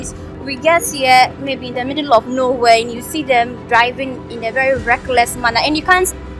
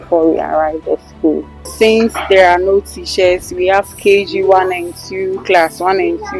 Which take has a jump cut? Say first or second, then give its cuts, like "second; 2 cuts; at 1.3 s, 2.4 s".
second; 1 cut; at 1.7 s